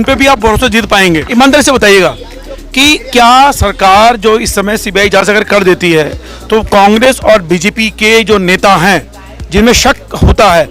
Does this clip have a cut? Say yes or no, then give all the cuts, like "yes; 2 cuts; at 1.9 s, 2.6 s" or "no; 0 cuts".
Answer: yes; 1 cut; at 1.3 s